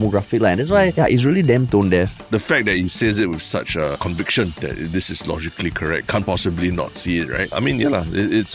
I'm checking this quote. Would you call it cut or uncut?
cut